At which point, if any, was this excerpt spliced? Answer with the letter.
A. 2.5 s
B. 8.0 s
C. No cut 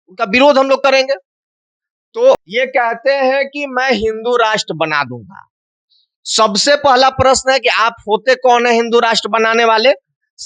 A